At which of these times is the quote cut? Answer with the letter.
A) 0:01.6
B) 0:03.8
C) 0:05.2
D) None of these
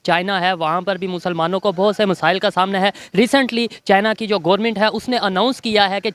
D